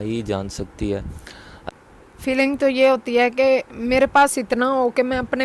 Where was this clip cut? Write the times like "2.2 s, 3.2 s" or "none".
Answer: 1.7 s